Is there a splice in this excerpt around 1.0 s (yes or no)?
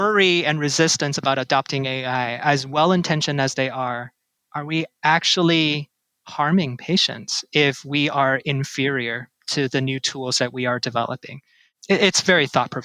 no